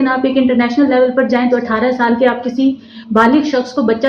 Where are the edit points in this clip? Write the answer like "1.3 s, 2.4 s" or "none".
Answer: none